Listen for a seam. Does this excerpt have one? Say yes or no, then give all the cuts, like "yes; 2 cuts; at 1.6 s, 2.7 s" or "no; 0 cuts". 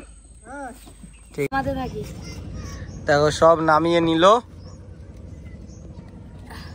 yes; 1 cut; at 1.5 s